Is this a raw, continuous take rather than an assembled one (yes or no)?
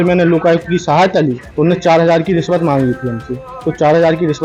no